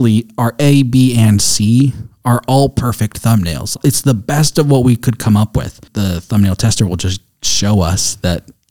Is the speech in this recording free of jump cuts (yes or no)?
no